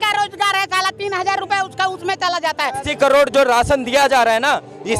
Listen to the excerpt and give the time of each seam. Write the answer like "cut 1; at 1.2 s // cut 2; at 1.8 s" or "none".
cut 1; at 2.9 s